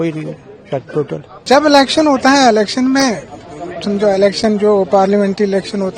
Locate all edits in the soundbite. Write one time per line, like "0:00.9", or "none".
0:01.3